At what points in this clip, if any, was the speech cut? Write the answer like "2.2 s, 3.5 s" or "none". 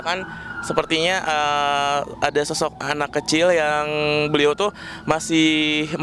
none